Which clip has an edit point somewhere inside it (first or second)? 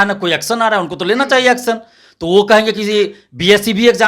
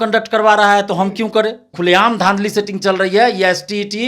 second